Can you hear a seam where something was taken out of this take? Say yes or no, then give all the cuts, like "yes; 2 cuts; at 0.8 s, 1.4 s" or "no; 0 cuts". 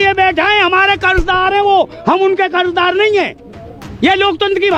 no; 0 cuts